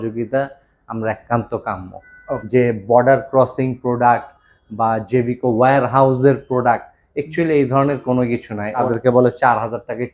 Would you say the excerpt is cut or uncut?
cut